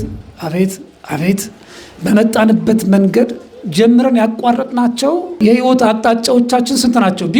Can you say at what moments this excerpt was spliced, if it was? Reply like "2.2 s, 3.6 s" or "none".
5.3 s